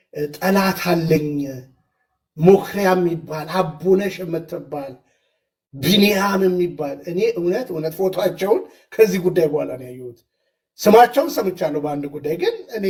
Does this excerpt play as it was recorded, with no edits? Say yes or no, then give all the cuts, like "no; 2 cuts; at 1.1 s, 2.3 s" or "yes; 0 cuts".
yes; 0 cuts